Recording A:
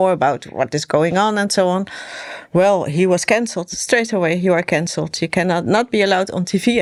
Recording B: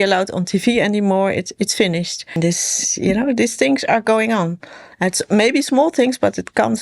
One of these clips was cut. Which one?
B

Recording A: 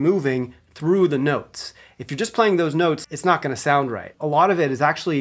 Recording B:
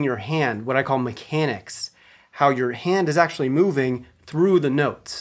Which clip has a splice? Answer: A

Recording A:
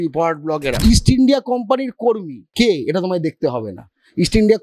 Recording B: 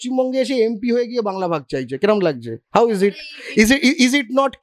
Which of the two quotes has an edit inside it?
A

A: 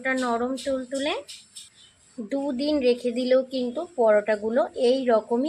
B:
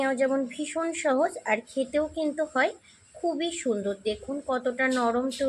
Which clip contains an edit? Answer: A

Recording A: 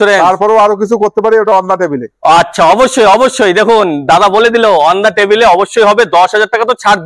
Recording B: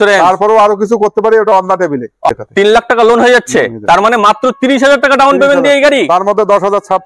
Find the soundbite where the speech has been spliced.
B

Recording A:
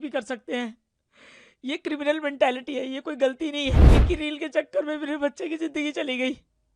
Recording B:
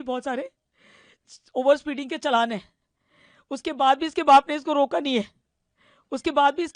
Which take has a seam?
A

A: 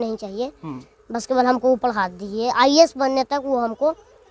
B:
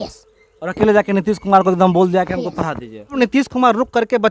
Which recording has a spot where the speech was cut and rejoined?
B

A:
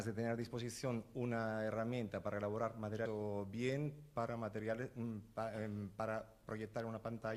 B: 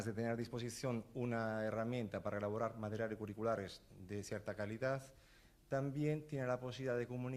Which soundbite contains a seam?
B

